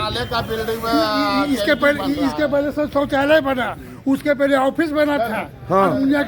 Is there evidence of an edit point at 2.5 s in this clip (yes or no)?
no